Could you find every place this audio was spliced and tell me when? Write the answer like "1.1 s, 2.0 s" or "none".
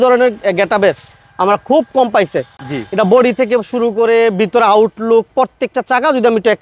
none